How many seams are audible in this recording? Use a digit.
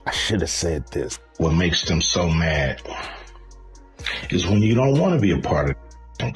1